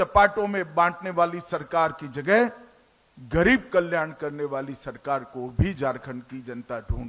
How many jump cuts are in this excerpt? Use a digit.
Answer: 0